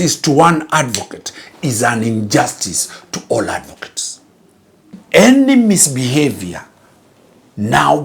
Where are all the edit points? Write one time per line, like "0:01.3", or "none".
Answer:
0:05.0